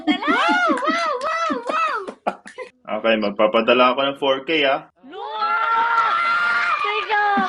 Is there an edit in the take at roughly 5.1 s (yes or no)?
no